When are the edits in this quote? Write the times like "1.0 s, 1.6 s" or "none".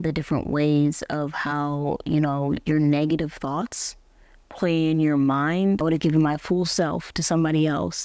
5.8 s